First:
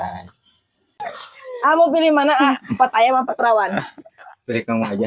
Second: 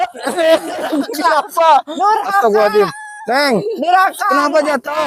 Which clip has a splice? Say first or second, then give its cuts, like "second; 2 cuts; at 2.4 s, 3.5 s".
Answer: first; 1 cut; at 1.1 s